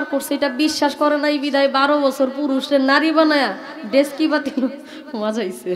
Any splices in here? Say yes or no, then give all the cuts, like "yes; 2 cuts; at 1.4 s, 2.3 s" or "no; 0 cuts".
no; 0 cuts